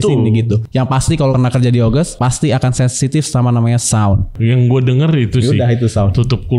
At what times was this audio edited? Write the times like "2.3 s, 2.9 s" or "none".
1.1 s, 2.1 s, 4.3 s